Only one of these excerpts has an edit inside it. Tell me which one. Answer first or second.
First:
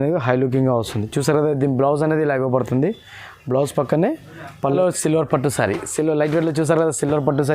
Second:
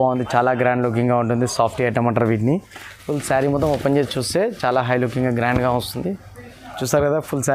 first